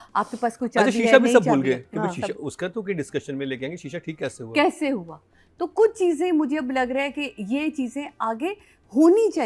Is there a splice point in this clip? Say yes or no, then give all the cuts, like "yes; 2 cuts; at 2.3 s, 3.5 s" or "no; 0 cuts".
no; 0 cuts